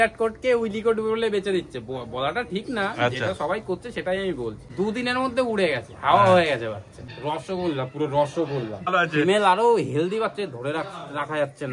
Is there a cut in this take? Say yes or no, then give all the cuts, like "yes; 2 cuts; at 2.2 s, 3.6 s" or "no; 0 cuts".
yes; 3 cuts; at 4.6 s, 7.1 s, 8.9 s